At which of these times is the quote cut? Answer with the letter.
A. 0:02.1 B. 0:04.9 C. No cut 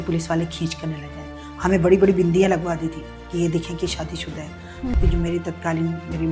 B